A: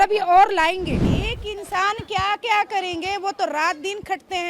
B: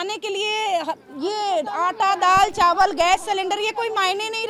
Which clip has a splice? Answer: A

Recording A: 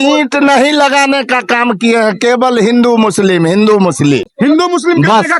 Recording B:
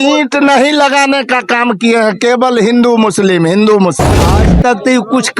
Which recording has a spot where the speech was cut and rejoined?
B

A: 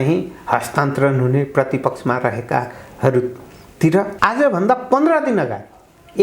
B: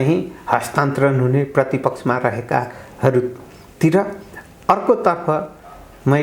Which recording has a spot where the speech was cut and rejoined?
A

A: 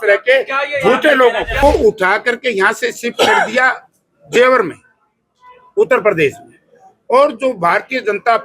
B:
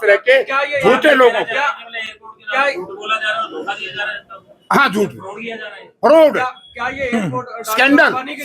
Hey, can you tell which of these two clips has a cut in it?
A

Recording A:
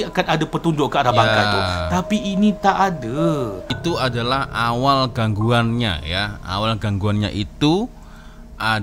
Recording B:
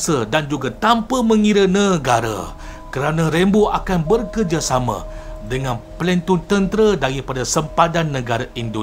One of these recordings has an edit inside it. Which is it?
A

